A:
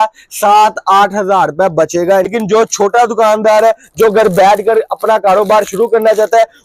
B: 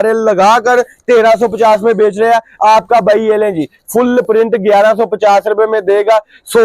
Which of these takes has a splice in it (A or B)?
A